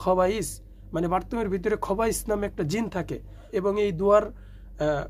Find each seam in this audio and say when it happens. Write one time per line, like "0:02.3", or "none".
0:03.5